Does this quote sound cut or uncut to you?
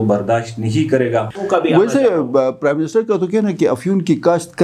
cut